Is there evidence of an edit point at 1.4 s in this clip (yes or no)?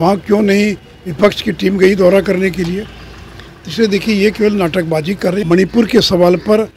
no